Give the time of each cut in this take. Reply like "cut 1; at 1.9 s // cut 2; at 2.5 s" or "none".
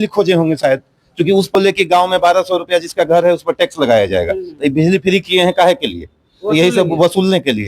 cut 1; at 1.5 s